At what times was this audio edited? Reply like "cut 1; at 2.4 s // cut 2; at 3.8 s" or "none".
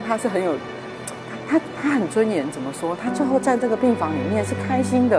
none

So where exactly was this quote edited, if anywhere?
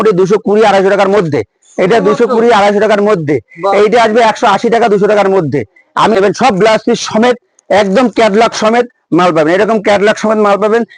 cut 1; at 6.2 s

